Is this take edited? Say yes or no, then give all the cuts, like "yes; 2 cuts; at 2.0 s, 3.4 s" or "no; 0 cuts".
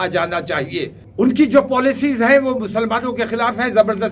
yes; 1 cut; at 1.0 s